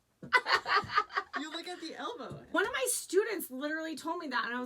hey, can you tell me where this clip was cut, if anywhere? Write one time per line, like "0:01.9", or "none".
0:02.5